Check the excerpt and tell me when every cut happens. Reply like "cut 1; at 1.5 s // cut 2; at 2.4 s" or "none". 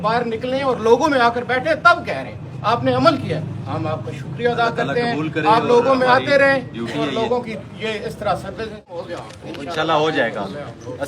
cut 1; at 8.9 s